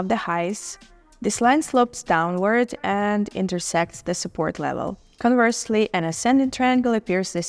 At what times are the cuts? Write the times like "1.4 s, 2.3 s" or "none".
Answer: 5.1 s